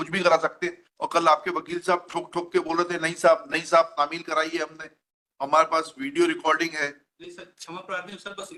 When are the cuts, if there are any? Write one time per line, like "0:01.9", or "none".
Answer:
none